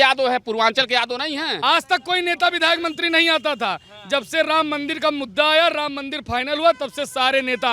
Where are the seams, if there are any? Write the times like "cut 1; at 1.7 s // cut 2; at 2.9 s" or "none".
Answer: cut 1; at 1.5 s